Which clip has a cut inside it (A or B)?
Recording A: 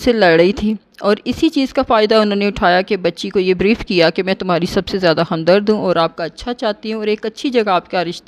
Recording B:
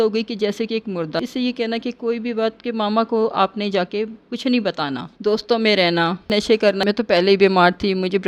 B